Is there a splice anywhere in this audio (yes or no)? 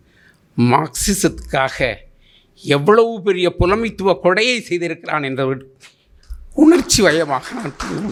no